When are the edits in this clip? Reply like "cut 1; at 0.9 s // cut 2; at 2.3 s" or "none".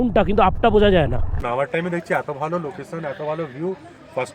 cut 1; at 1.4 s